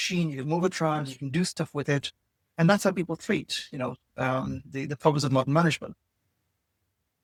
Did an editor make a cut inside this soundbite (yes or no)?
no